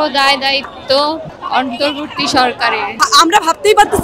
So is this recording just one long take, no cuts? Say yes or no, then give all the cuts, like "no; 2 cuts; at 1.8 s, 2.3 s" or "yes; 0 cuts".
no; 1 cut; at 2.9 s